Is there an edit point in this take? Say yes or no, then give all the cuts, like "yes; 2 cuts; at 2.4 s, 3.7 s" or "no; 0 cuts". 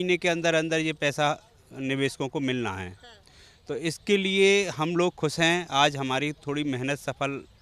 no; 0 cuts